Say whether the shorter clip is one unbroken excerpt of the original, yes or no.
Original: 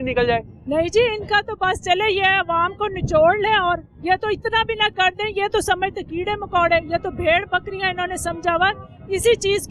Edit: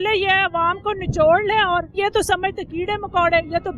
no